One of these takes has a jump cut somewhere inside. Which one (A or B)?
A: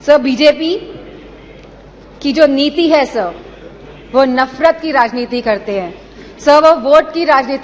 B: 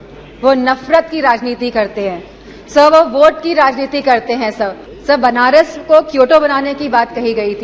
B